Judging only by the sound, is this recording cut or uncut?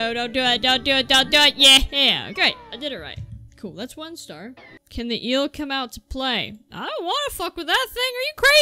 cut